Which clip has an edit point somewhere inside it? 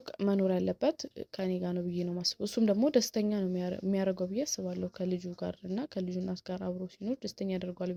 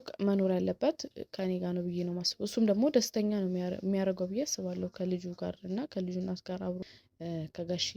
second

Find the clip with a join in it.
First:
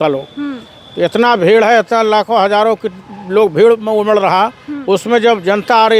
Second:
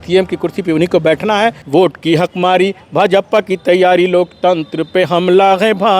second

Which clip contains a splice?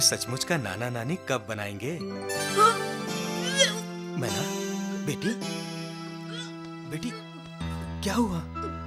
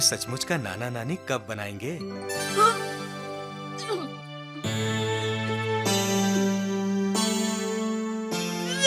first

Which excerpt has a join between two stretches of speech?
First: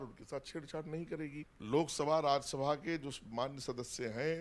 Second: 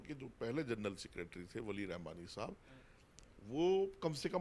first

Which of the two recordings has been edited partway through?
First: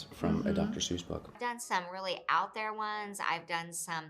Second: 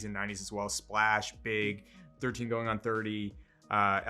first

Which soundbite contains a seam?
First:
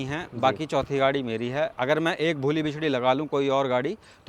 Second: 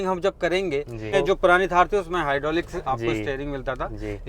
second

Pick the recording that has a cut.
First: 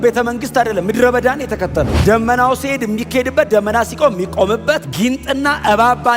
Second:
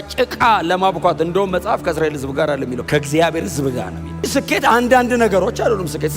second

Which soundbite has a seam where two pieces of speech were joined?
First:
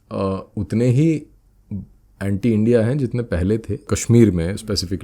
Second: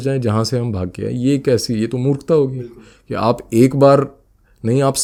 first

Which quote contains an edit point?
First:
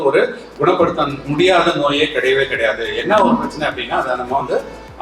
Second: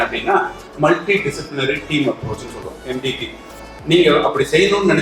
second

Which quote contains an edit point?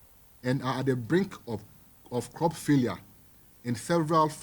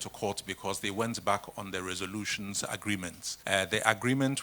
second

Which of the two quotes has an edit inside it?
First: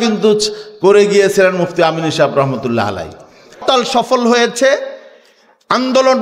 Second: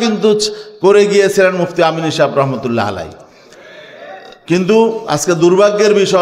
first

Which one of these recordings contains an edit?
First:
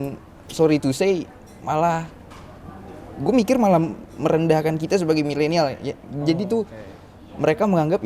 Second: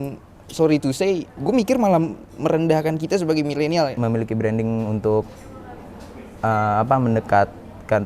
second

